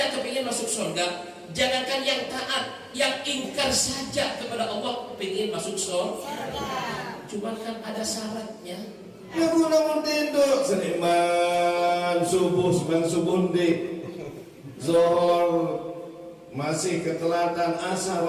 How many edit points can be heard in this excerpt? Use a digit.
1